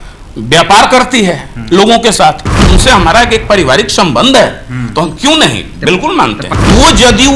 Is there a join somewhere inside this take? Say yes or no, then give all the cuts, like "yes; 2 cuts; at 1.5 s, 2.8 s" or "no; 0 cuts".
yes; 2 cuts; at 2.5 s, 6.4 s